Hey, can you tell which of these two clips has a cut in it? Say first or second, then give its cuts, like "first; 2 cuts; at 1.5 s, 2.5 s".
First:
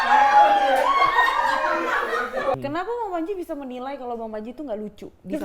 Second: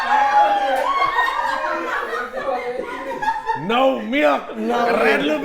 first; 1 cut; at 2.5 s